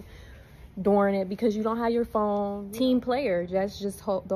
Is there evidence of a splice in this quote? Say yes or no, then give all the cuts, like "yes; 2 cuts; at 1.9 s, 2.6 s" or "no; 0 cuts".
yes; 1 cut; at 2.6 s